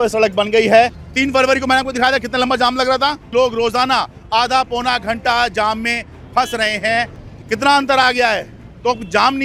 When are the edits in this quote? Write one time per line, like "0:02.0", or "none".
0:01.0
0:03.2
0:07.2